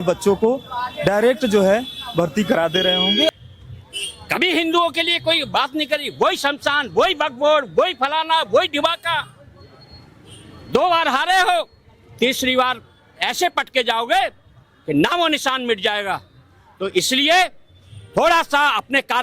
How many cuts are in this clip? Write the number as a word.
one